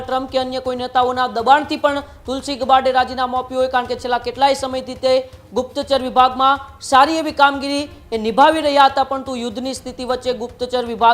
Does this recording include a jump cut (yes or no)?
no